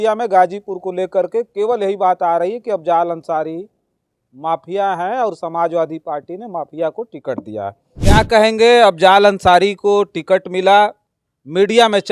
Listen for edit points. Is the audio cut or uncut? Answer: cut